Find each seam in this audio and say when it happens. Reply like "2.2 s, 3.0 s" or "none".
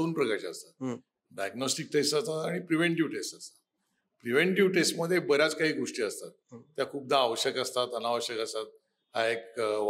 none